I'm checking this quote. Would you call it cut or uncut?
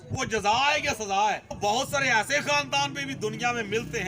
cut